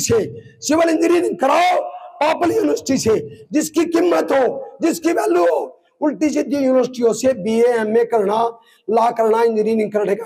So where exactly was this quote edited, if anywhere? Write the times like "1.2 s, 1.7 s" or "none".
none